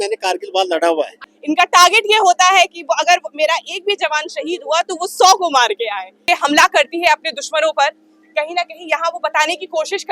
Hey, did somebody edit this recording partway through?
yes; 2 cuts; at 1.3 s, 6.1 s

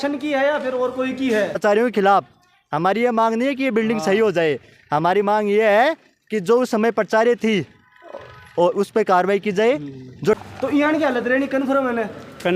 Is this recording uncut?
no; 2 cuts; at 1.6 s, 10.4 s

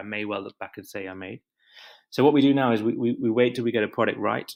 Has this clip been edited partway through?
no; 0 cuts

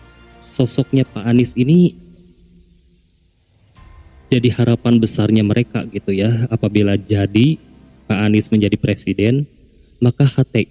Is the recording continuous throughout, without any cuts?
yes; 0 cuts

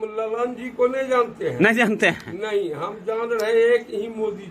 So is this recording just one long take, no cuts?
yes; 0 cuts

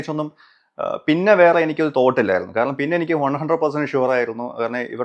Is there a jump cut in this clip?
no; 0 cuts

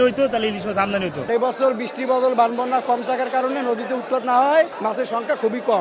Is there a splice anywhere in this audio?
yes; 2 cuts; at 1.2 s, 4.7 s

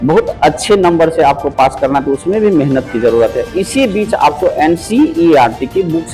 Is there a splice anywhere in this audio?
no; 0 cuts

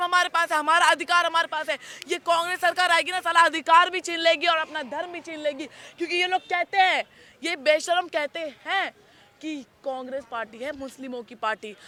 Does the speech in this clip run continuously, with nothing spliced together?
yes; 0 cuts

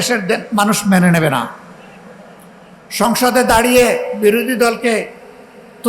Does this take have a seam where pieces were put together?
no; 0 cuts

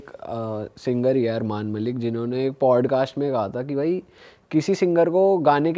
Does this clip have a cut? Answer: no; 0 cuts

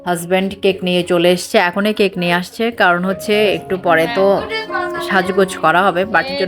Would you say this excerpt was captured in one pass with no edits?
yes; 0 cuts

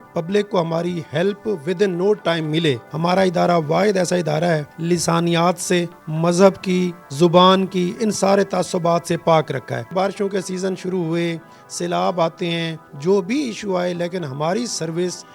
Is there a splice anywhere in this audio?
yes; 4 cuts; at 2.8 s, 4.7 s, 9.9 s, 12.8 s

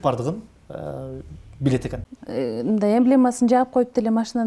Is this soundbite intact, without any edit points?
no; 1 cut; at 2.1 s

